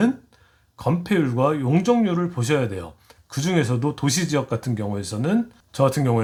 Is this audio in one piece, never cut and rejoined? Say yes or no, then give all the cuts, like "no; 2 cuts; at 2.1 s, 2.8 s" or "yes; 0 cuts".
yes; 0 cuts